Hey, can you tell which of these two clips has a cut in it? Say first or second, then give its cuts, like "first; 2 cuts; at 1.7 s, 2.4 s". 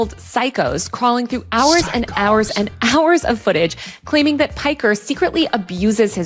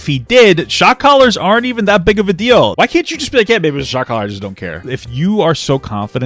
second; 2 cuts; at 2.7 s, 4.9 s